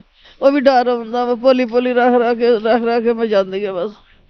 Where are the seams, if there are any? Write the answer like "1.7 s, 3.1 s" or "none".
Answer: none